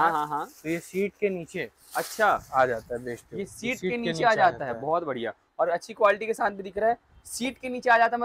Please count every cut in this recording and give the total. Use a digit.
0